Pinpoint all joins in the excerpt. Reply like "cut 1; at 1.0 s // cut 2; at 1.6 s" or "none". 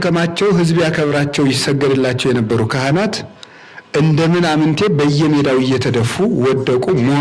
none